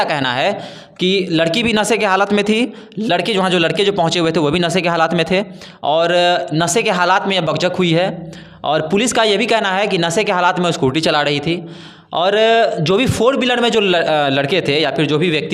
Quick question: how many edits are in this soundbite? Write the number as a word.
zero